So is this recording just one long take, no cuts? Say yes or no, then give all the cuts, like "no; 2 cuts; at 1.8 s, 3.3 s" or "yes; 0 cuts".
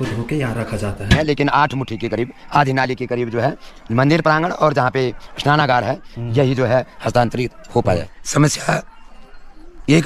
no; 2 cuts; at 1.4 s, 8.1 s